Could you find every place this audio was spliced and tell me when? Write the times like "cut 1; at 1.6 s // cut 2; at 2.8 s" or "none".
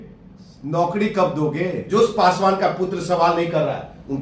cut 1; at 1.8 s